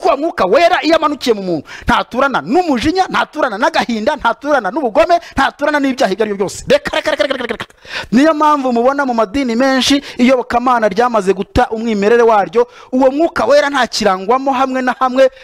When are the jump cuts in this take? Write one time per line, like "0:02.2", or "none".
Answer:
none

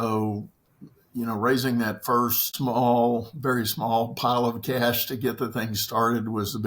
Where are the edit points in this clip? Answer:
0:02.4

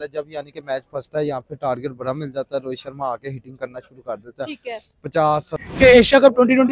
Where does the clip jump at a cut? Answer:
0:05.6

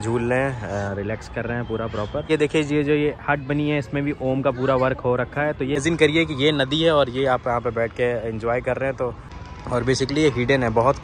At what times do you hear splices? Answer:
0:02.3
0:05.8
0:09.3

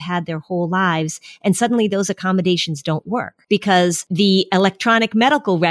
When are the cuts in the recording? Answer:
0:03.3
0:04.1

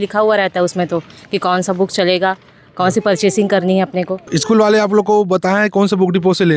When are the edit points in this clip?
0:04.3

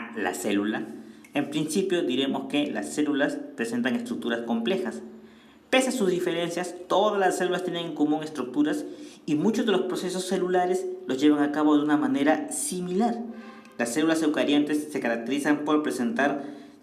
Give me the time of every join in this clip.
none

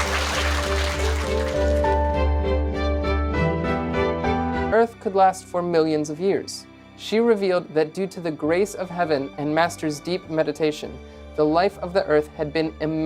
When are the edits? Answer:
0:04.7

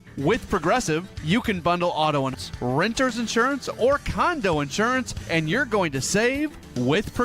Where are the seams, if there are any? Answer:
0:02.3

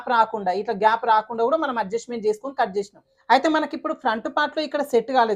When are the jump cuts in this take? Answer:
0:03.1

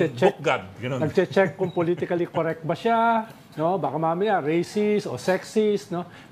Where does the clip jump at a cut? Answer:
none

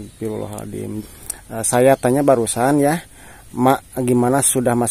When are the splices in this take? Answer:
0:00.9

